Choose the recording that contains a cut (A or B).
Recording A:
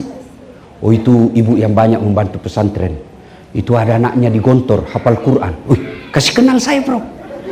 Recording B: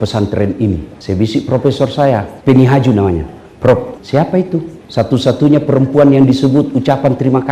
B